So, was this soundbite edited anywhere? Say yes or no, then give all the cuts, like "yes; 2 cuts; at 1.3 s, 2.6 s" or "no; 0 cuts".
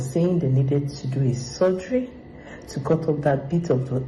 no; 0 cuts